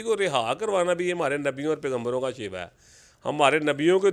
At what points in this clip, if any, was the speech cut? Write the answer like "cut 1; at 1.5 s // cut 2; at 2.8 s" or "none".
none